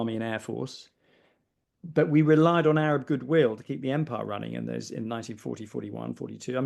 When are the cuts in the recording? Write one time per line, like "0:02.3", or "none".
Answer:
none